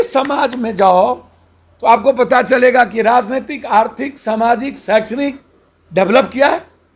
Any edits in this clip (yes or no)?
no